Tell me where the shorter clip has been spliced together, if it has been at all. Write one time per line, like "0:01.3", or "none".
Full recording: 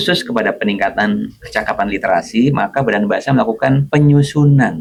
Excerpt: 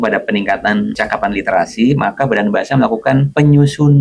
0:01.0